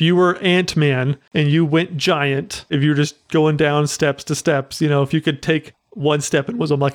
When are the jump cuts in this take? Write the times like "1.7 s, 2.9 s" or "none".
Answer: 1.2 s, 2.7 s